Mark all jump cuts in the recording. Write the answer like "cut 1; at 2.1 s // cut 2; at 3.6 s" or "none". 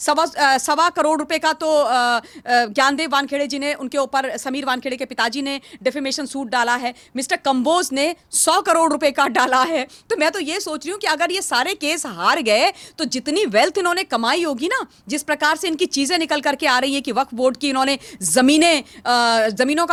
none